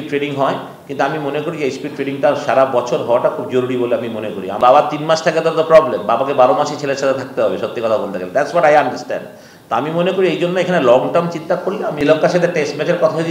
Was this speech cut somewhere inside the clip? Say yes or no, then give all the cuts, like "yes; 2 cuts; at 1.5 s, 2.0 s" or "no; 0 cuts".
yes; 2 cuts; at 4.6 s, 11.9 s